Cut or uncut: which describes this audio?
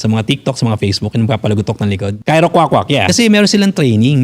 cut